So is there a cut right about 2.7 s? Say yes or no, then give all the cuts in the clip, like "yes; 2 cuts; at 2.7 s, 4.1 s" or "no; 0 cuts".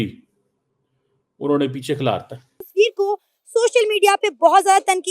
yes; 1 cut; at 2.7 s